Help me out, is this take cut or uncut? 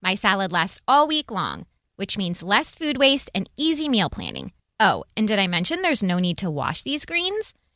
uncut